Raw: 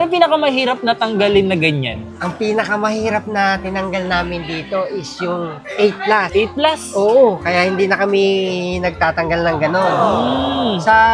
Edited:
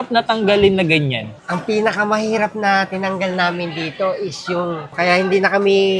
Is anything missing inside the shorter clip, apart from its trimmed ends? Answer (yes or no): yes